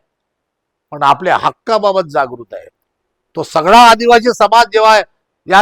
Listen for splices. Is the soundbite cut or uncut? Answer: uncut